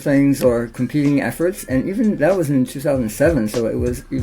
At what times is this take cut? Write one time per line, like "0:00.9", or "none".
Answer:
none